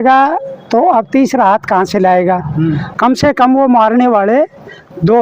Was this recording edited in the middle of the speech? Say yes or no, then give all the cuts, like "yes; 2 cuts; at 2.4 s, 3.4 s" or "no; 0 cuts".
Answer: yes; 1 cut; at 2.9 s